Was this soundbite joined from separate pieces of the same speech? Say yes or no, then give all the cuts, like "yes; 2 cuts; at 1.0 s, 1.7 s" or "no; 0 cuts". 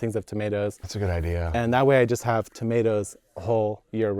yes; 1 cut; at 0.9 s